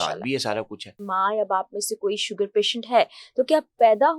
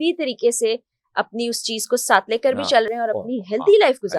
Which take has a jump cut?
first; 1 cut; at 1.1 s

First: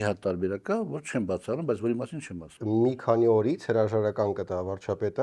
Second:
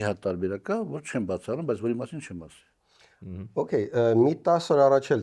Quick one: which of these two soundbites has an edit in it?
first; 1 cut; at 2.5 s

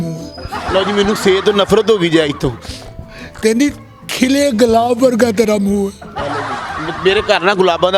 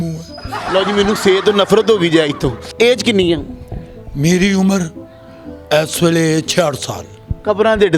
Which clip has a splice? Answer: second; 1 cut; at 2.6 s

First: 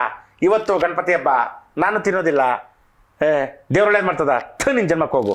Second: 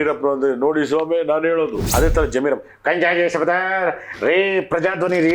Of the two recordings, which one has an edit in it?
second; 1 cut; at 1.8 s

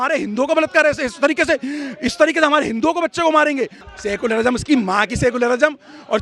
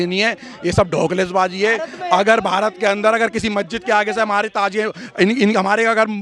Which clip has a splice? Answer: first; 1 cut; at 3.8 s

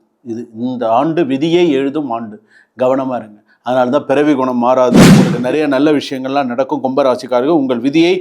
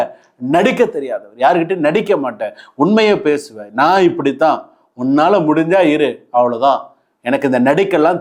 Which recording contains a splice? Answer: first; 1 cut; at 5.4 s

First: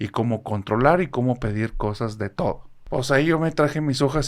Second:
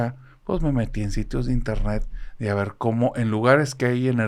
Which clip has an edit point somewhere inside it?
first; 1 cut; at 2.7 s

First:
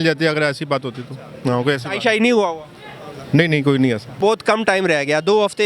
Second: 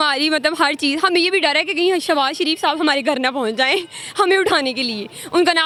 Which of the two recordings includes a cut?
first; 1 cut; at 4.1 s

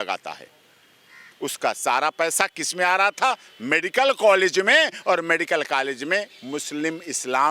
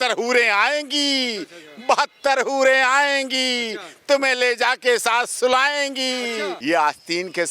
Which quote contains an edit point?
second; 1 cut; at 6.5 s

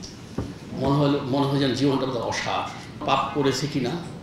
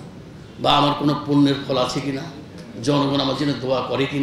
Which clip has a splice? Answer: first; 1 cut; at 3.0 s

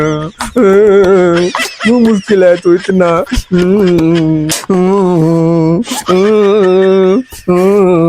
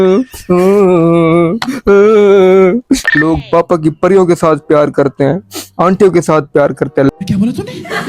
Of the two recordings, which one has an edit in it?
second; 1 cut; at 3.1 s

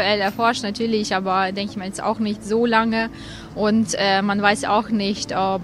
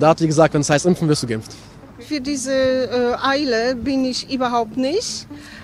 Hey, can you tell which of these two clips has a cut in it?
second; 1 cut; at 2.0 s

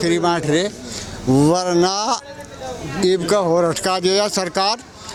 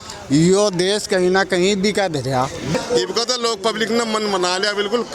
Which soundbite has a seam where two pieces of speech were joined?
second; 1 cut; at 2.7 s

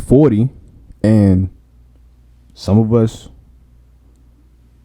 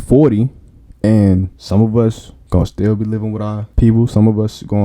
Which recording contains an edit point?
second; 3 cuts; at 1.6 s, 2.3 s, 3.6 s

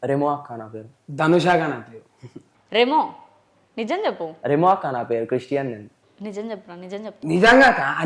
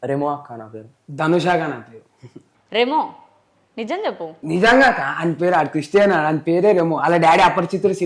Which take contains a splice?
second; 1 cut; at 4.4 s

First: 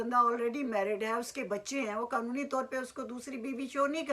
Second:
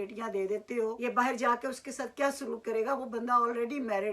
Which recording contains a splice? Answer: second; 1 cut; at 1.0 s

